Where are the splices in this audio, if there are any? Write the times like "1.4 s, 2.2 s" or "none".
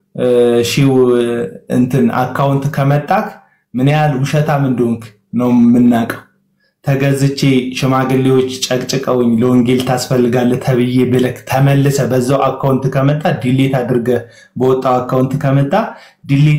none

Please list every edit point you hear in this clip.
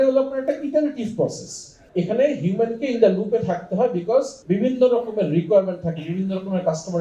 1.8 s, 4.4 s

